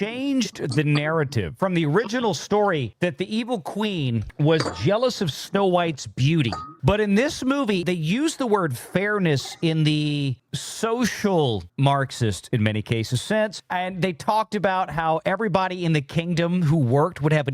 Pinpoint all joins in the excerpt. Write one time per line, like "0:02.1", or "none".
0:01.5
0:02.9
0:13.6